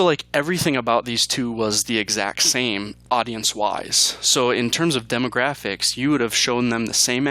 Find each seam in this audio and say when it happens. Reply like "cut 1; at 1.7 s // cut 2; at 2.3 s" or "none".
cut 1; at 2.9 s

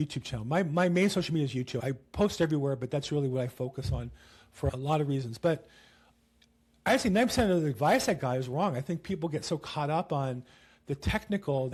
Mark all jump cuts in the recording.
none

